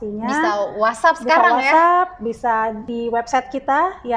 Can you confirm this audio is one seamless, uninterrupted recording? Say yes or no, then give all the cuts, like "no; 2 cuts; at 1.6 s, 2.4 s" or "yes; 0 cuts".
no; 1 cut; at 2.9 s